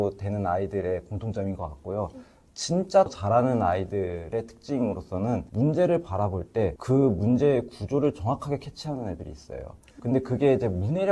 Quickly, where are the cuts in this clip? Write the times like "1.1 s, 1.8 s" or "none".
none